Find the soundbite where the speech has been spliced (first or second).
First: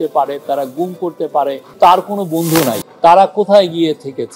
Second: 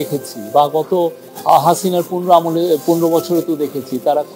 first